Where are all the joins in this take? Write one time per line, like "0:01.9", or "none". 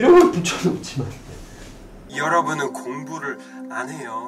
0:02.0